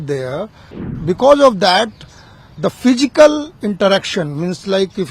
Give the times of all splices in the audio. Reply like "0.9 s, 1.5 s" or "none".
0.9 s